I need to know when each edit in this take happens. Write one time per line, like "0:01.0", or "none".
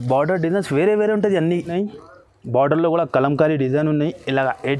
0:01.7